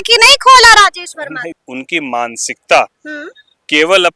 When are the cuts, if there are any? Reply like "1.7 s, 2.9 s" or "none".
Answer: 1.5 s